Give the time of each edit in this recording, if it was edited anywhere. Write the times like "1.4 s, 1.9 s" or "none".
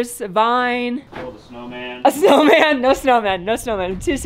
1.1 s